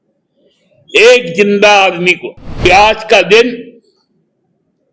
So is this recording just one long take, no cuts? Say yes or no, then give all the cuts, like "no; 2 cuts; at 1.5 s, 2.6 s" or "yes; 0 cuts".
no; 1 cut; at 2.6 s